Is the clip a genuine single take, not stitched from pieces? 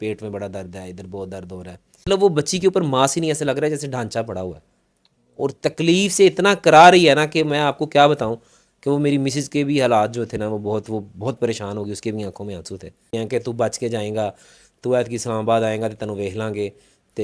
no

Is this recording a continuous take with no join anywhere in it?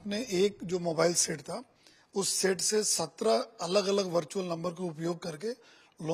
yes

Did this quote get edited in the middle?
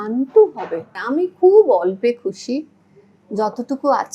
yes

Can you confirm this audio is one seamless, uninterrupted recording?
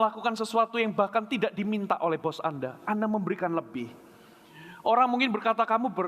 yes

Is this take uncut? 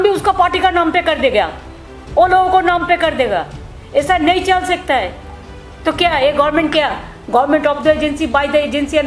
no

